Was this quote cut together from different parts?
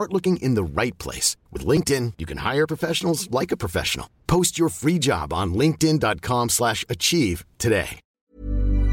yes; 1 cut; at 8.0 s

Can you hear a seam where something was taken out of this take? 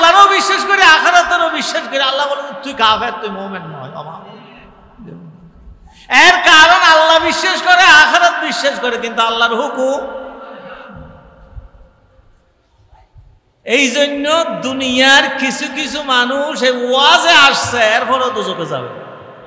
no; 0 cuts

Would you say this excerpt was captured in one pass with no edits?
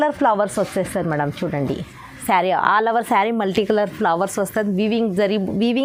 yes; 0 cuts

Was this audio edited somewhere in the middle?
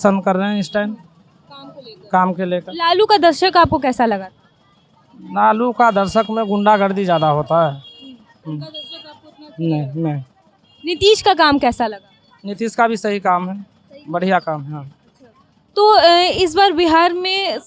no; 0 cuts

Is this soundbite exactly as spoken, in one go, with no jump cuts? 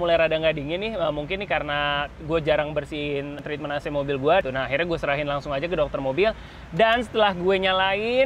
no; 2 cuts; at 3.3 s, 4.4 s

